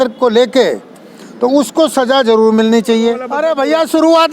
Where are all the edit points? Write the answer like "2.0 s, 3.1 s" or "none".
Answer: 3.3 s